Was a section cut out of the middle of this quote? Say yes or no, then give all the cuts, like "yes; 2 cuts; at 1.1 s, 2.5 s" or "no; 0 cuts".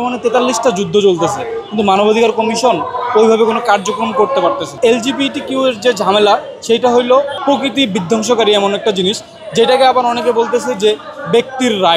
yes; 2 cuts; at 4.7 s, 7.4 s